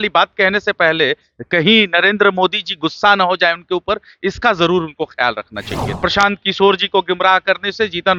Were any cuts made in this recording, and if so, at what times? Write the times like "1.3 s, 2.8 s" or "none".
5.9 s